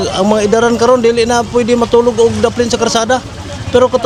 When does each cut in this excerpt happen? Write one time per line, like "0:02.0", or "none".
none